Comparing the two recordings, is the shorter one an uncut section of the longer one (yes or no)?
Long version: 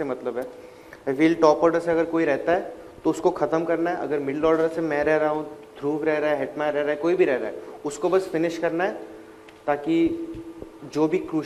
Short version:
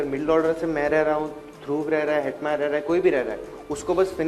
yes